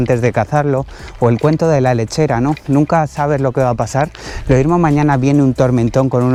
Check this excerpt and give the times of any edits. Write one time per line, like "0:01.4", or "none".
none